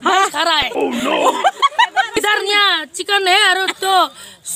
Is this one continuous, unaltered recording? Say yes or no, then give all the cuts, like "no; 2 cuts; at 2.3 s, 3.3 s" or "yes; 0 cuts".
no; 1 cut; at 2.2 s